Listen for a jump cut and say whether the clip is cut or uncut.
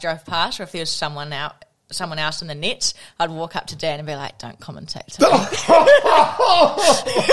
uncut